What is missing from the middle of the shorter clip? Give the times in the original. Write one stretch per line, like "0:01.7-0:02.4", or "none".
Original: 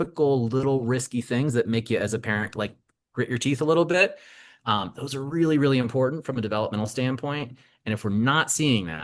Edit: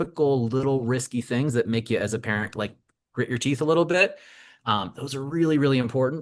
none